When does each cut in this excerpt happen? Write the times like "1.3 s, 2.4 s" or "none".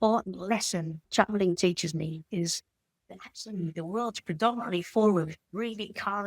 1.0 s